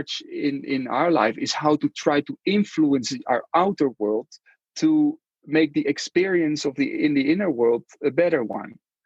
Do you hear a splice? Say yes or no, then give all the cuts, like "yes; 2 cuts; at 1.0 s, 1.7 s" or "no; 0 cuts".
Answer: no; 0 cuts